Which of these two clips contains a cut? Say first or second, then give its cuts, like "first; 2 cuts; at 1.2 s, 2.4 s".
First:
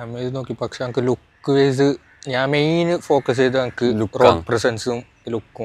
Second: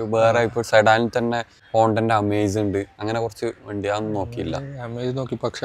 second; 1 cut; at 1.6 s